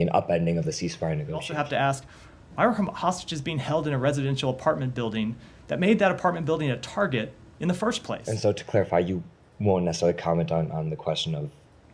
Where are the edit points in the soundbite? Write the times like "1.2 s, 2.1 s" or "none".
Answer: 1.5 s, 8.3 s